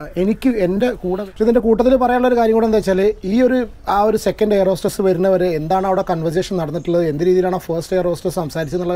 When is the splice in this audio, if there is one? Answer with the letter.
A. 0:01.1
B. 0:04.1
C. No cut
A